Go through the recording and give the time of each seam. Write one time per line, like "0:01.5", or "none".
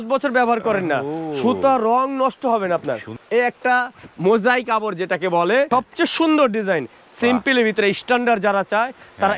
0:03.1
0:05.7